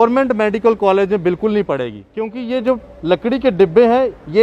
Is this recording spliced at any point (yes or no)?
yes